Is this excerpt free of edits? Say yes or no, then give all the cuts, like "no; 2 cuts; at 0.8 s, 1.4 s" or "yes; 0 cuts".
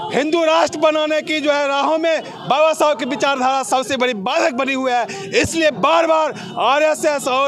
yes; 0 cuts